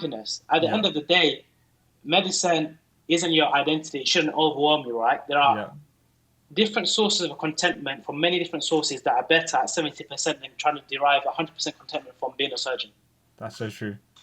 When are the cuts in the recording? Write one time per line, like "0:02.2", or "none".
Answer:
none